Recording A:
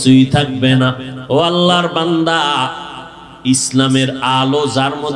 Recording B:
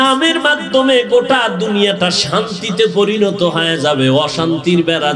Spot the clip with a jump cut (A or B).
A